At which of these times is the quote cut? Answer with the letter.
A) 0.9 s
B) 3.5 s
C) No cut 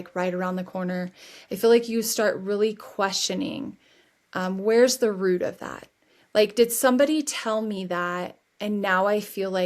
C